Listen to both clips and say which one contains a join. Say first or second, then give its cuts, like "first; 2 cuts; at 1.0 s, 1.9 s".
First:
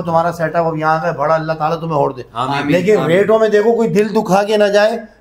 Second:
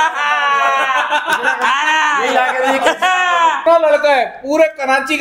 second; 1 cut; at 3.6 s